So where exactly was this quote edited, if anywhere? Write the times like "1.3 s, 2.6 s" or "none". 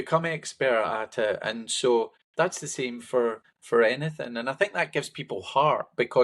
2.2 s, 3.5 s